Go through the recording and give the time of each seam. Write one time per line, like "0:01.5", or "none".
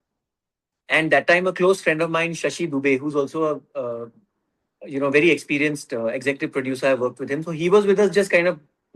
none